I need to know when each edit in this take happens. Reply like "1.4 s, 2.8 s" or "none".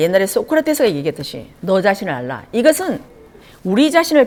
none

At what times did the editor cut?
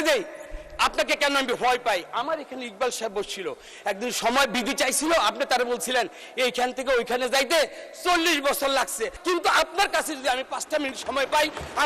9.1 s

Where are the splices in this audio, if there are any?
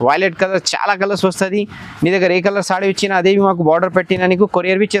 none

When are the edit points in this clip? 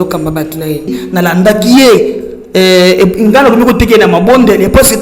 1.0 s

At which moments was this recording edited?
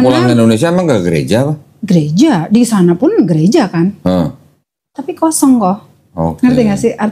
none

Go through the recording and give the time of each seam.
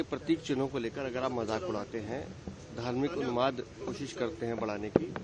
none

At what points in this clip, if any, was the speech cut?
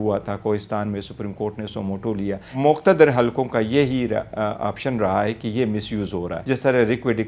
2.5 s, 6.4 s

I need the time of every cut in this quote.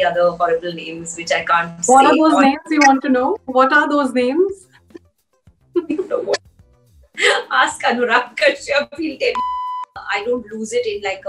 9.6 s

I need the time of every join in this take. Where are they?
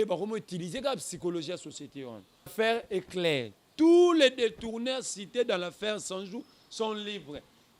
2.5 s

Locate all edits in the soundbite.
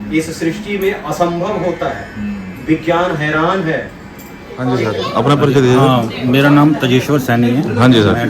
4.5 s

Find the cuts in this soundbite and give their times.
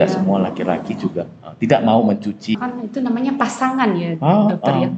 2.5 s

